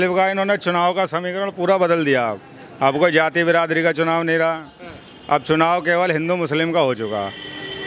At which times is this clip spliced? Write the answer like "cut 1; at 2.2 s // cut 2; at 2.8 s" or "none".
none

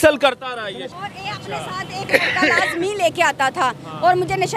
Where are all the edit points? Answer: cut 1; at 0.9 s

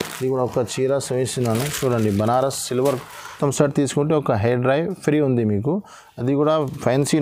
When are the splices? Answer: cut 1; at 3.4 s

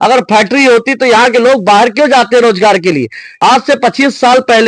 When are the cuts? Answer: cut 1; at 3.2 s

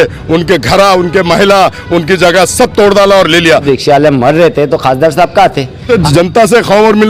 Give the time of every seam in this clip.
cut 1; at 3.6 s // cut 2; at 5.9 s

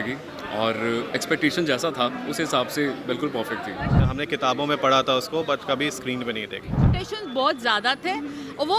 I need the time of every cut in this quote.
cut 1; at 4.0 s // cut 2; at 6.9 s

